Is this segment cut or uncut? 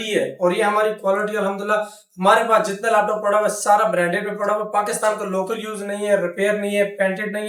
uncut